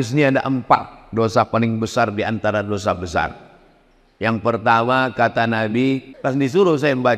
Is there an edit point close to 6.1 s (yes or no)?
yes